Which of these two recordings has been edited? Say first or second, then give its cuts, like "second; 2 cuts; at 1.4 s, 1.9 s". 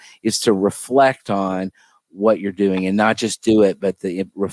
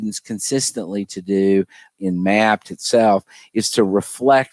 second; 1 cut; at 1.9 s